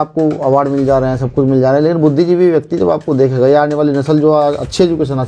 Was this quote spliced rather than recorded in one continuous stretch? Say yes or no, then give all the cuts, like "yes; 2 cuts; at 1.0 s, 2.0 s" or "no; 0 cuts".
no; 0 cuts